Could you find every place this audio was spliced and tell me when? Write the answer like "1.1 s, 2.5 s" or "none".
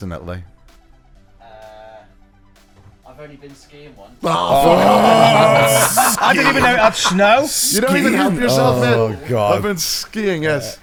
none